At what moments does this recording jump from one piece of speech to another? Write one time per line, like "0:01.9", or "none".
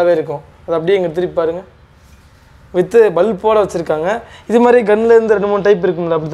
none